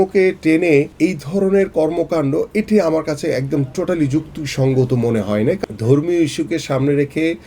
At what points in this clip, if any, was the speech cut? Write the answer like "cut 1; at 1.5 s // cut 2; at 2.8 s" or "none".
cut 1; at 0.9 s // cut 2; at 5.6 s